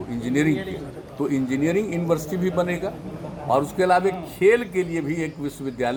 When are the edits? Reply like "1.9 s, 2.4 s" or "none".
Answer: none

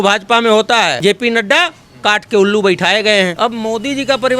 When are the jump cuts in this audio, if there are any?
1.0 s, 3.3 s

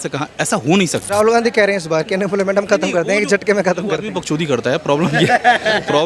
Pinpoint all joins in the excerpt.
1.0 s

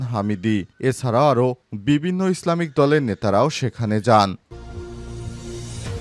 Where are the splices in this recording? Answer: 4.5 s

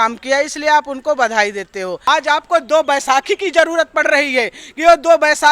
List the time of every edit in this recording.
2.0 s

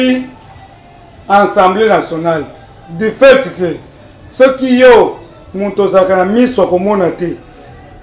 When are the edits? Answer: none

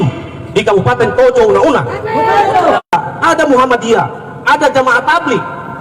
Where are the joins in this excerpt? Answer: 2.8 s

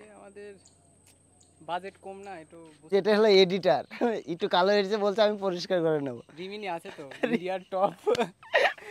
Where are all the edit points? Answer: 2.9 s

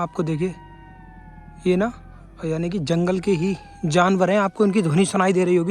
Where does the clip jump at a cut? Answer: none

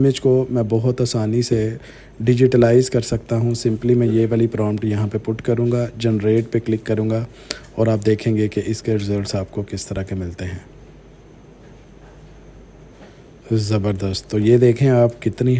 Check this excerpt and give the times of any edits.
none

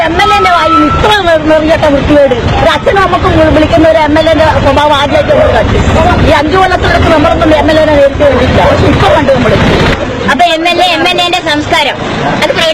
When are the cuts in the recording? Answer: 2.6 s

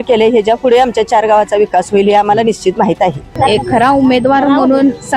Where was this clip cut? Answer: 3.3 s

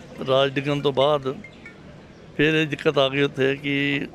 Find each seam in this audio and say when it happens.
none

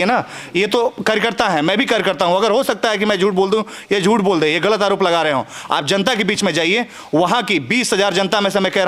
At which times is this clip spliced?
none

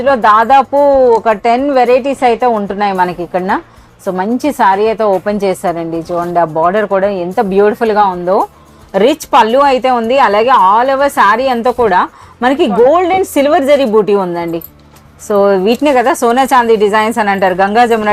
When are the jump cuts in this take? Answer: none

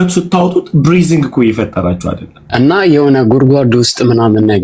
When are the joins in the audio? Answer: 2.3 s

